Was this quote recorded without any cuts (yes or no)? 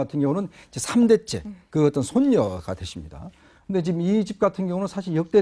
yes